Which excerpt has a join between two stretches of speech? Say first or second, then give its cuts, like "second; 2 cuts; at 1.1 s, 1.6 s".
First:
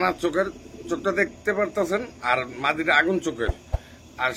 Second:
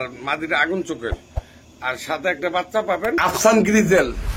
second; 1 cut; at 3.2 s